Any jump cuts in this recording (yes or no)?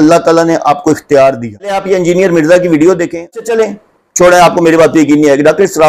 yes